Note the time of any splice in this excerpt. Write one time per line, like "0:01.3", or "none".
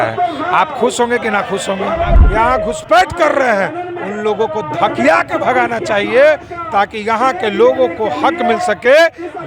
0:02.2

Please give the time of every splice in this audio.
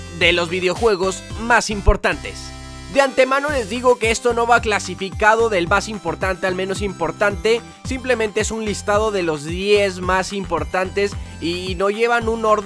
0:02.4

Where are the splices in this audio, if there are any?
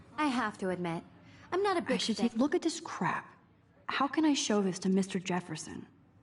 0:02.1

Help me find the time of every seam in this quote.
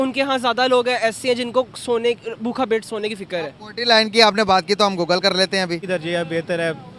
0:05.8

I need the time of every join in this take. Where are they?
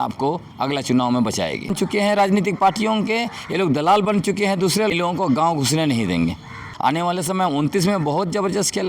0:01.7
0:04.9
0:07.1

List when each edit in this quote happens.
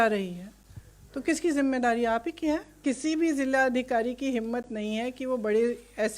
0:02.8

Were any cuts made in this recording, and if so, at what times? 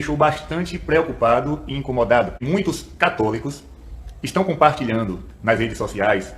0:02.4

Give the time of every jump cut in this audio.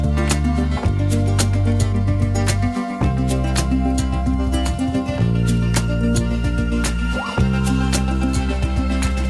none

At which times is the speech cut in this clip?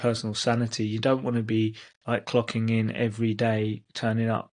none

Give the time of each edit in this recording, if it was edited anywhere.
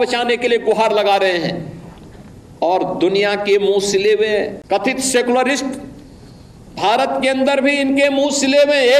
0:04.6

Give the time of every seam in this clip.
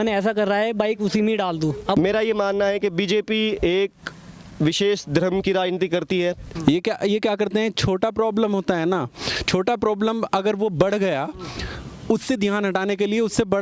0:02.0
0:06.5

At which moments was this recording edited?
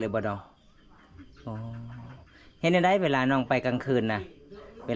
none

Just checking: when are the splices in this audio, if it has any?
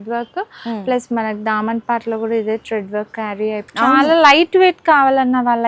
0:03.6

